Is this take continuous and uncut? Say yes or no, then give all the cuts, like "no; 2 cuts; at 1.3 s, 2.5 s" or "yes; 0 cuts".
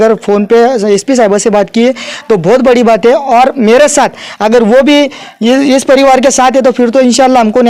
yes; 0 cuts